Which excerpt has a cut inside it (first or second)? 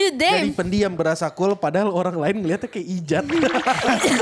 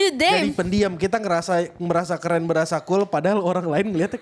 first